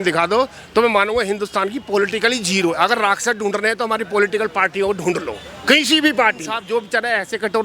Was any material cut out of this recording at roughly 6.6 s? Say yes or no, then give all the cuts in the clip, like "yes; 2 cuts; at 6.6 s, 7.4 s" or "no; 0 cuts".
yes; 1 cut; at 6.6 s